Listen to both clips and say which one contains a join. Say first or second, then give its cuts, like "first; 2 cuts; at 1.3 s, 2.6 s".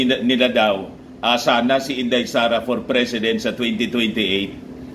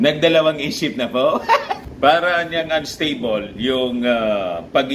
second; 1 cut; at 1.9 s